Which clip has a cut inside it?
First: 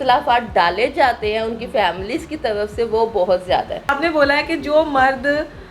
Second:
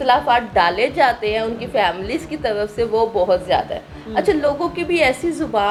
first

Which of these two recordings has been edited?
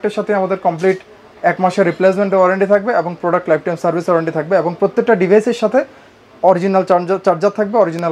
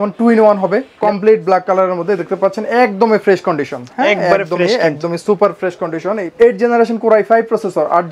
second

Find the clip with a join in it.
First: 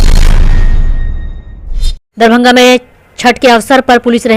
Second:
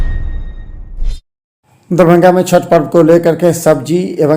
second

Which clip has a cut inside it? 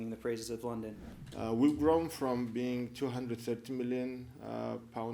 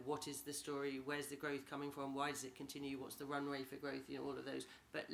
first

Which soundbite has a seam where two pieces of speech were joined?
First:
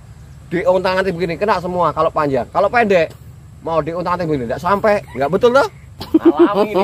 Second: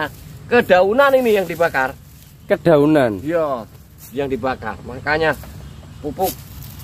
first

